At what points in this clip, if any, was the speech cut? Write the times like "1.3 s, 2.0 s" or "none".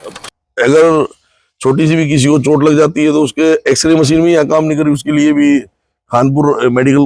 none